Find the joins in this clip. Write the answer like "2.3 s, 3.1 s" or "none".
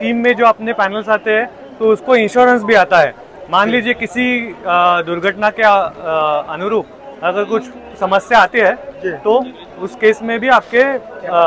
none